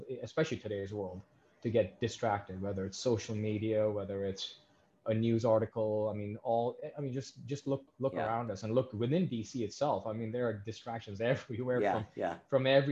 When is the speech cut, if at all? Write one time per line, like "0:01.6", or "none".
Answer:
0:07.9